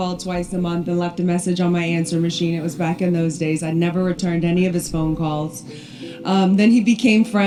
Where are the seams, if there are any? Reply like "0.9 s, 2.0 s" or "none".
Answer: none